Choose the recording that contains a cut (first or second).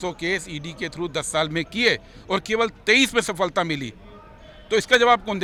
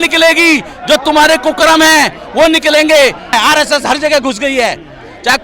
second